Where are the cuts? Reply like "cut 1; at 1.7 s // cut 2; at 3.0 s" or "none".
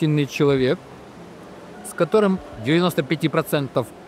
cut 1; at 2.5 s